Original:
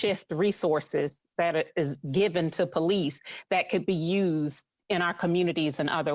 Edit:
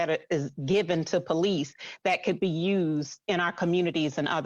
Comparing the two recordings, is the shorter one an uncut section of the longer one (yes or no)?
no